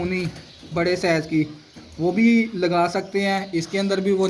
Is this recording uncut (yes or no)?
yes